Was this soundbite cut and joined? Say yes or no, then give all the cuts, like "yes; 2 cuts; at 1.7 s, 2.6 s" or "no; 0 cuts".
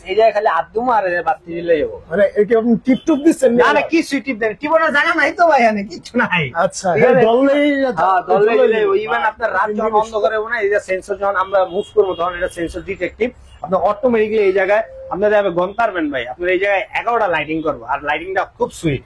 no; 0 cuts